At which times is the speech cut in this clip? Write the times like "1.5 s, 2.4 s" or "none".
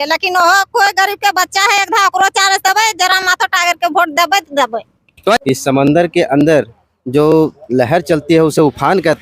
5.4 s